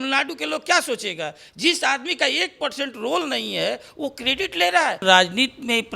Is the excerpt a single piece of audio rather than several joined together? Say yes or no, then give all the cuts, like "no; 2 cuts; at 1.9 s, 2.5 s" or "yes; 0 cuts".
no; 1 cut; at 5.0 s